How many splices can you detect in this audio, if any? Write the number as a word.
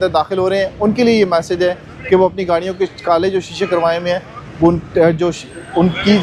zero